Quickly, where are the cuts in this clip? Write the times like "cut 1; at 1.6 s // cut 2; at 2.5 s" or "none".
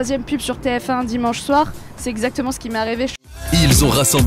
cut 1; at 3.2 s